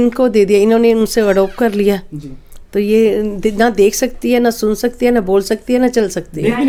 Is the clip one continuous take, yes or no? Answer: yes